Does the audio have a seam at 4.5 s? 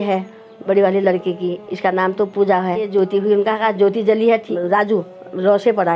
yes; 2 cuts; at 2.9 s, 4.5 s

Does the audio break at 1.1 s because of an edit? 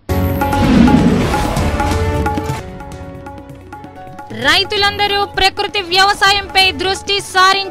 no; 2 cuts; at 2.6 s, 4.3 s

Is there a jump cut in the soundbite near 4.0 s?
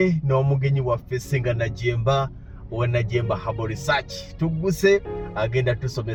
no; 0 cuts

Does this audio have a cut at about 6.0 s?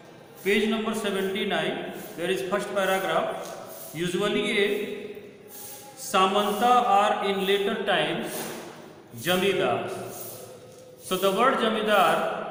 no; 0 cuts

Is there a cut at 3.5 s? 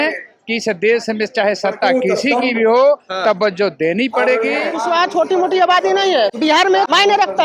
no; 2 cuts; at 4.7 s, 6.6 s

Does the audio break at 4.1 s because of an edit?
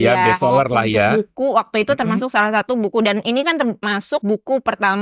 yes; 1 cut; at 4.1 s

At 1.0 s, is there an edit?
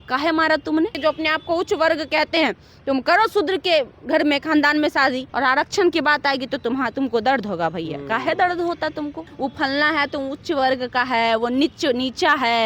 yes; 3 cuts; at 1.0 s, 5.3 s, 9.2 s

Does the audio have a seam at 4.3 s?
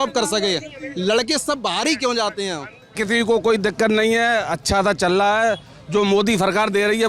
no; 1 cut; at 3.0 s

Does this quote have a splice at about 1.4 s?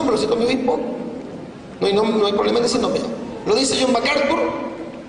no; 1 cut; at 3.0 s

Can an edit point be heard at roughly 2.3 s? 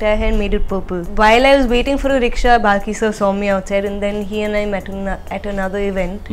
no; 1 cut; at 1.0 s

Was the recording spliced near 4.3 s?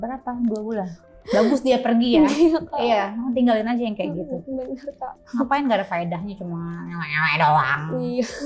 no; 1 cut; at 1.0 s

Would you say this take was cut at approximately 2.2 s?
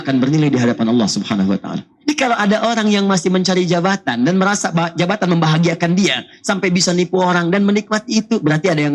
yes; 1 cut; at 2.2 s

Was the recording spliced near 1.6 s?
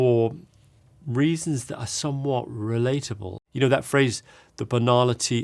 no; 1 cut; at 3.3 s

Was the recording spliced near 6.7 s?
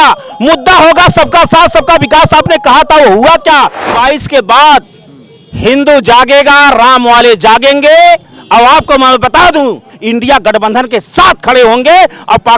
no; 2 cuts; at 3.9 s, 9.9 s

